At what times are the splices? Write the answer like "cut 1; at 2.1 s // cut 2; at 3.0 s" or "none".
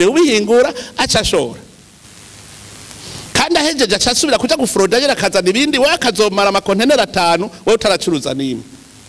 cut 1; at 2.0 s